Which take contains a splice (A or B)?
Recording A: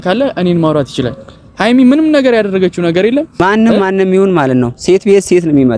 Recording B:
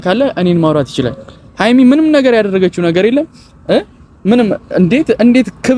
A